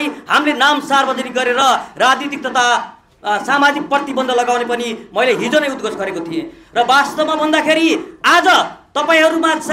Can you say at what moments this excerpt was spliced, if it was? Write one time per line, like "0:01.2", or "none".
none